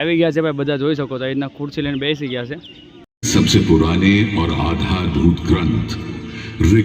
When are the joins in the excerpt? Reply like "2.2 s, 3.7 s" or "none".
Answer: 3.2 s